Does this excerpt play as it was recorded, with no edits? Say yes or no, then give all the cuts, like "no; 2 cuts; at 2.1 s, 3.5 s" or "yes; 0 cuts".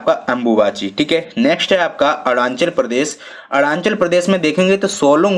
yes; 0 cuts